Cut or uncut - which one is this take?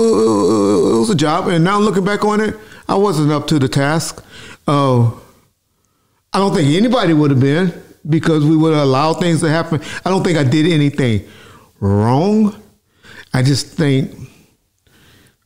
uncut